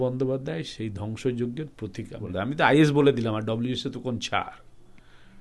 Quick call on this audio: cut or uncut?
cut